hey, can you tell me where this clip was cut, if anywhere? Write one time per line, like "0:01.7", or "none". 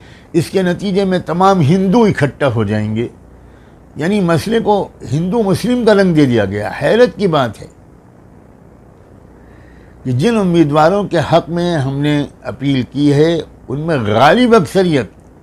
none